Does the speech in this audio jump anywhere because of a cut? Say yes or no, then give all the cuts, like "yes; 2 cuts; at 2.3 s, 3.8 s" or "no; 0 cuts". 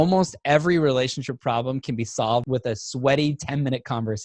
yes; 1 cut; at 2.5 s